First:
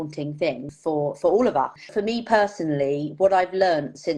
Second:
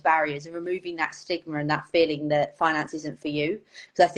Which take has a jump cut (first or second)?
first